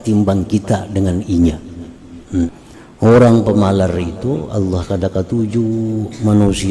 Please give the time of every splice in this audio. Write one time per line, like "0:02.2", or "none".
0:02.5